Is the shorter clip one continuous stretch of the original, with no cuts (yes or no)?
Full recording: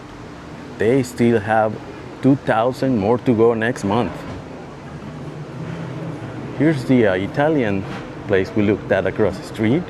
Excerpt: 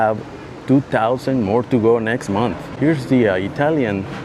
no